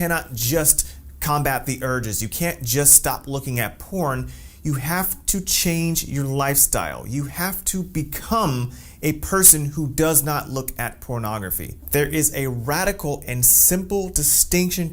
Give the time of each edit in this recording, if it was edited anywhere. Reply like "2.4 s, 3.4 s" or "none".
none